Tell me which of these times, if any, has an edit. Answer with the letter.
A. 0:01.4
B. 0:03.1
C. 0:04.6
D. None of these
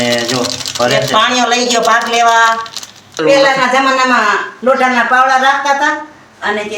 B